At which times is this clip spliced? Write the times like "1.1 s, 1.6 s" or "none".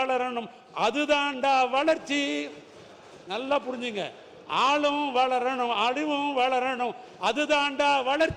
none